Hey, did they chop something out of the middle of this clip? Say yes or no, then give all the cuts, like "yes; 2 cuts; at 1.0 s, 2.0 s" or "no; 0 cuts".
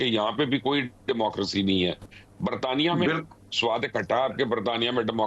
no; 0 cuts